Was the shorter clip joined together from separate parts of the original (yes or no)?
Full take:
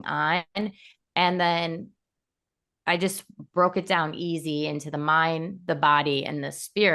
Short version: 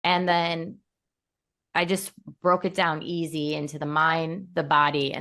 no